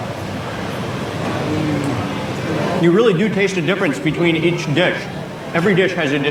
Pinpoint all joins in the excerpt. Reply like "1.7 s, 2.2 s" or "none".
none